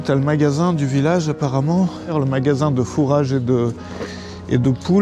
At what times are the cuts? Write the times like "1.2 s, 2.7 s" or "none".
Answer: 2.1 s